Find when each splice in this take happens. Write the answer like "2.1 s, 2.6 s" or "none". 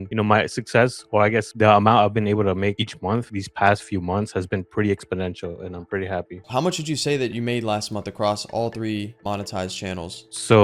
6.4 s

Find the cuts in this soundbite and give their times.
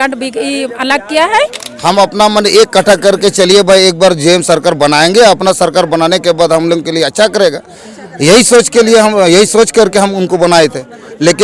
1.7 s

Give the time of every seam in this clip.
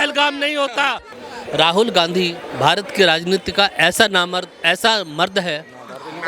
1.1 s

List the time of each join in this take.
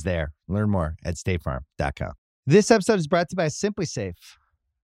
2.2 s

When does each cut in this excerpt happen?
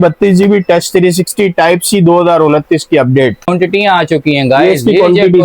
3.5 s

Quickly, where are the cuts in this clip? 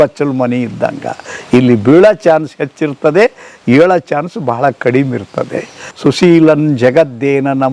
5.8 s

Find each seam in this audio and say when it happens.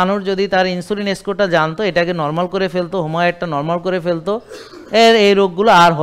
none

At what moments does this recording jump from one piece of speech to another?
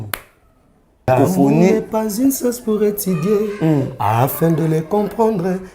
1.1 s

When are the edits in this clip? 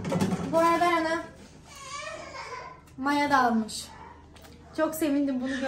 none

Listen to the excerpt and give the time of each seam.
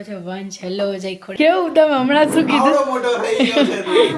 1.3 s

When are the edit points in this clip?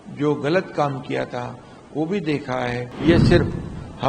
2.9 s

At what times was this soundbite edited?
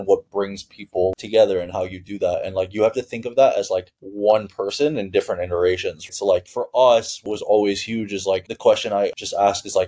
1.1 s, 6.1 s, 7.2 s

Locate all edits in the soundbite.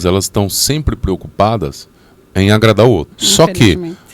3.2 s

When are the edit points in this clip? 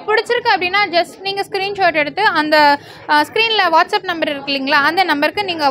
none

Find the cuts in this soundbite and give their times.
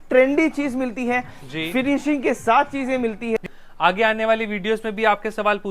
3.5 s

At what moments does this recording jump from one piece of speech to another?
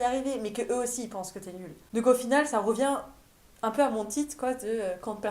none

